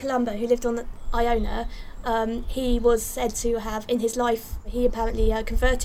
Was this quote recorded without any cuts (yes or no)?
no